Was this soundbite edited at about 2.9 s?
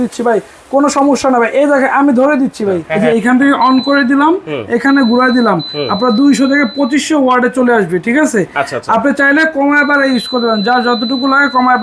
yes; 1 cut; at 2.9 s

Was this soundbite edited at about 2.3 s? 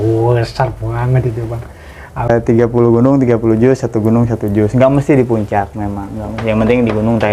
yes; 1 cut; at 2.3 s

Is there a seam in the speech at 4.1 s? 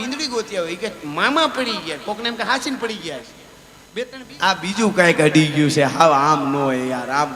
yes; 1 cut; at 4.1 s

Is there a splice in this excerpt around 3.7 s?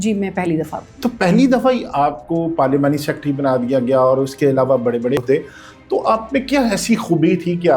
no; 1 cut; at 5.2 s

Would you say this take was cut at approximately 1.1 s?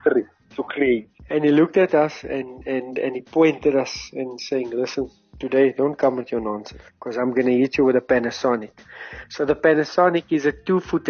yes; 1 cut; at 1.1 s

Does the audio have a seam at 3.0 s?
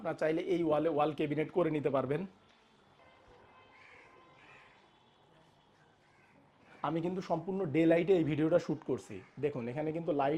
yes; 1 cut; at 3.0 s

